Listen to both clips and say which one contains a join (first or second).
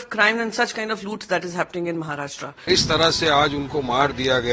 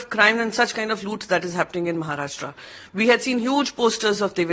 first